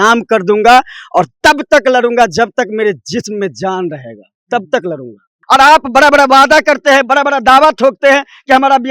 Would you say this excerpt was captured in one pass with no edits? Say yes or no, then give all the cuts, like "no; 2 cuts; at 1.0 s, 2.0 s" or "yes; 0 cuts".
no; 1 cut; at 5.4 s